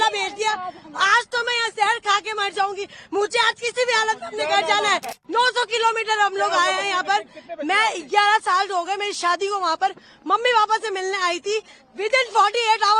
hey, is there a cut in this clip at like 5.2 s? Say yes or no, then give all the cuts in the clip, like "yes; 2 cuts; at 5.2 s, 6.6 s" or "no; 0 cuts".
yes; 1 cut; at 5.2 s